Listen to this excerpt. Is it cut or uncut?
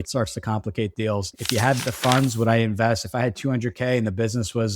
cut